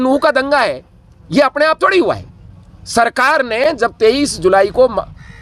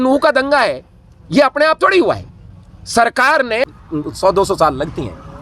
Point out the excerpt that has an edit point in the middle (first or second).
second